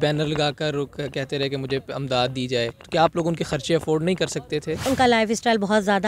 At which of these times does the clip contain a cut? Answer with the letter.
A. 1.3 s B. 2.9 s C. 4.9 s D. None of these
C